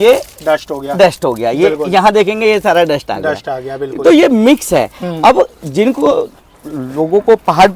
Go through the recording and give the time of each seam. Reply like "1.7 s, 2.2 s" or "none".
none